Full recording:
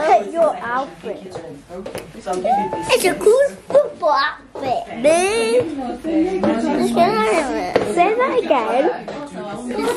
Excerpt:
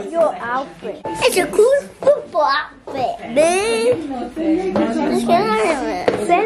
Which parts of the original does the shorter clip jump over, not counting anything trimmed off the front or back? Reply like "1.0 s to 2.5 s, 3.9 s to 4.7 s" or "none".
1.3 s to 2.8 s